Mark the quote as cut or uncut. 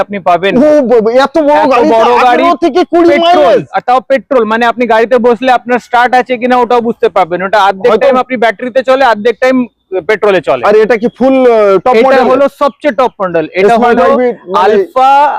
uncut